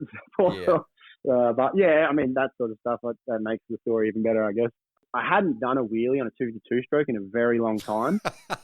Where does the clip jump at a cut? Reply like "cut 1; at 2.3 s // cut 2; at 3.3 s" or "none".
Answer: cut 1; at 5.1 s